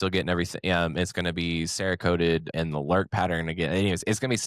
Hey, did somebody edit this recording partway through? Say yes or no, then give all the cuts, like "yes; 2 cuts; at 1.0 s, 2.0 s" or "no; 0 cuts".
yes; 1 cut; at 2.5 s